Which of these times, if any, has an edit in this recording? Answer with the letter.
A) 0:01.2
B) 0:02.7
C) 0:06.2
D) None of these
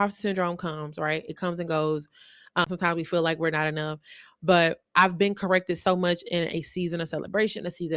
B